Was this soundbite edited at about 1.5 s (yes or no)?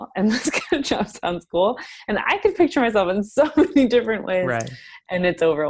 no